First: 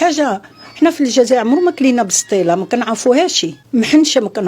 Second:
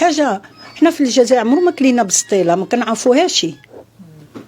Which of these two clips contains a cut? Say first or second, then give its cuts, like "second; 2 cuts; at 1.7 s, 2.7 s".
first; 1 cut; at 3.5 s